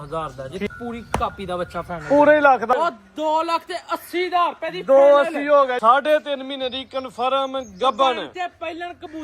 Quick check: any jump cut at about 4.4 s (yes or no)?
no